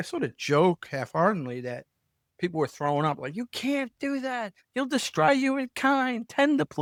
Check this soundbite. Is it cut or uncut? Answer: uncut